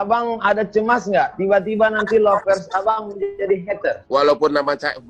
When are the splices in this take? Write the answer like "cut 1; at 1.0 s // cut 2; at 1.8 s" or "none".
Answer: cut 1; at 4.0 s